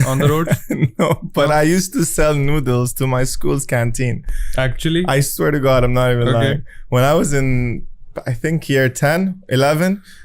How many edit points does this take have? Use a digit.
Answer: 0